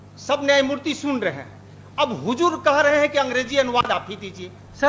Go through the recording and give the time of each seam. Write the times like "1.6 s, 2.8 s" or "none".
none